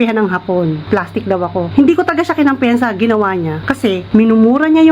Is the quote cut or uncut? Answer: cut